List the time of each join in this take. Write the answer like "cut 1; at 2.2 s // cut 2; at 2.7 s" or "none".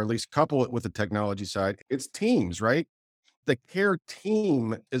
cut 1; at 1.8 s // cut 2; at 3.4 s